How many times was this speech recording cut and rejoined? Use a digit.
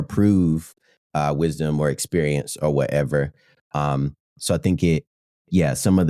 0